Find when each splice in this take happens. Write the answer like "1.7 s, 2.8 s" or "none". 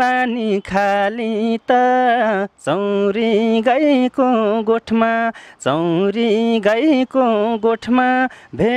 none